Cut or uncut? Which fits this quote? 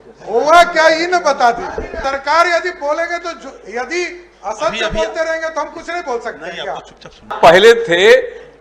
cut